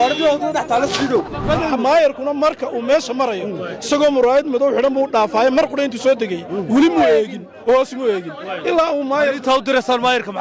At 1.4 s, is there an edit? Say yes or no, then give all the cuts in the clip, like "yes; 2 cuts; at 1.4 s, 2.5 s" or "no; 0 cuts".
yes; 1 cut; at 1.4 s